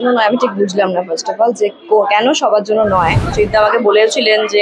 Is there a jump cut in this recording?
yes; 1 cut; at 3.3 s

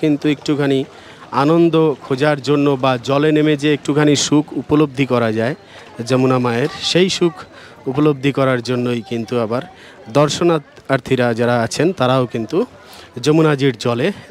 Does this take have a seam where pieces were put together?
no; 0 cuts

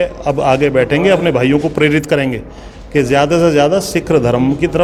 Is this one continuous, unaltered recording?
yes; 0 cuts

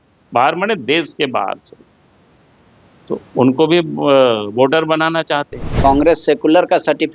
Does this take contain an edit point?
yes; 1 cut; at 5.8 s

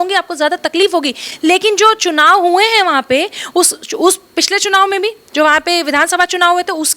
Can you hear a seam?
no; 0 cuts

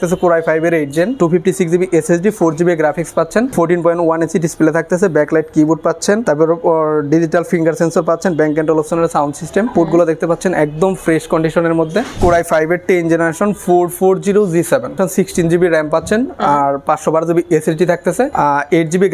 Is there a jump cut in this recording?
yes; 7 cuts; at 1.1 s, 3.5 s, 6.2 s, 9.7 s, 12.1 s, 14.9 s, 18.3 s

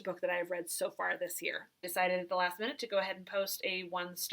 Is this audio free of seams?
no; 1 cut; at 1.8 s

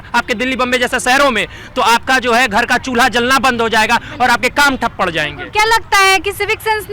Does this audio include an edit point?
no; 0 cuts

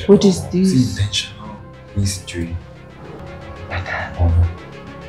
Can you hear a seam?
yes; 1 cut; at 3.1 s

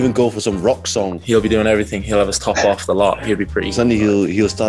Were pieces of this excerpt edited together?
yes; 1 cut; at 1.2 s

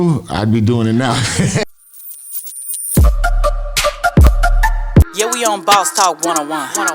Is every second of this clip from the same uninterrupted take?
no; 1 cut; at 1.6 s

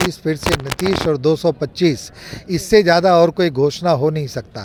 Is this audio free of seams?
yes; 0 cuts

